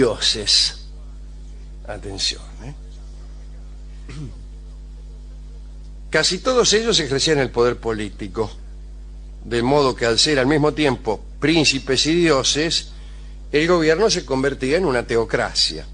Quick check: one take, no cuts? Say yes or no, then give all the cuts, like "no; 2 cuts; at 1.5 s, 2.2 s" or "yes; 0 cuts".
yes; 0 cuts